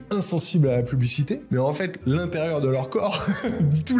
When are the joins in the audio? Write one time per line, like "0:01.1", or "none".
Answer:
0:01.4